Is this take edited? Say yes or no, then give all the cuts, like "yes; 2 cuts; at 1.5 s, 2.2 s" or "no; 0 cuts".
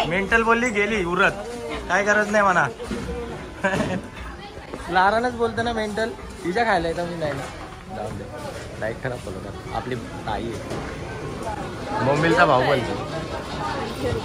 no; 0 cuts